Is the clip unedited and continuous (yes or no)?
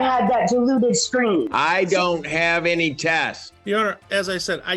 yes